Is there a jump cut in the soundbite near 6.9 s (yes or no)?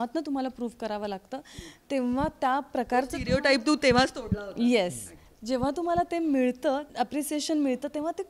yes